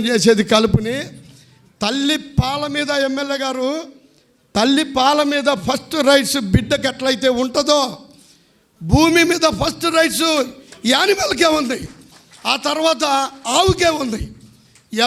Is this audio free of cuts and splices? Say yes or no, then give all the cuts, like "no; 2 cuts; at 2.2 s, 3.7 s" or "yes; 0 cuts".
yes; 0 cuts